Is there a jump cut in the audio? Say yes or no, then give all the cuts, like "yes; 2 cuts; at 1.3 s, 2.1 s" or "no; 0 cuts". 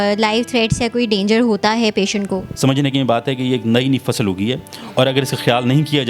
yes; 1 cut; at 2.5 s